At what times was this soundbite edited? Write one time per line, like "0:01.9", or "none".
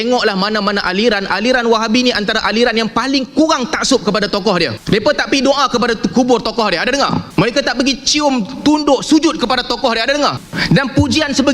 0:04.8
0:07.3
0:10.5